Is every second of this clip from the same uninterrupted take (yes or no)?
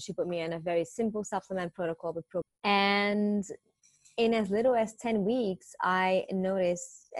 no